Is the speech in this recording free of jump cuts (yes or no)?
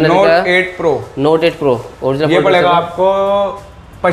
yes